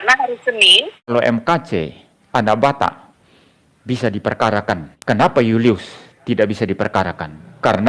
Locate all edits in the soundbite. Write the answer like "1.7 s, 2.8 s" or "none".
1.1 s, 4.9 s